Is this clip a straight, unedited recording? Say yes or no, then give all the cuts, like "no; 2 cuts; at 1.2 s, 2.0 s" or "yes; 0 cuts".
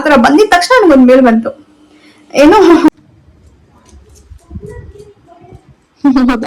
no; 1 cut; at 2.9 s